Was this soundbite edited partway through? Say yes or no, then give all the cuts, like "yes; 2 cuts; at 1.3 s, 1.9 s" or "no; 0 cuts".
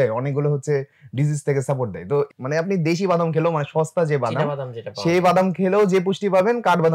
yes; 1 cut; at 2.3 s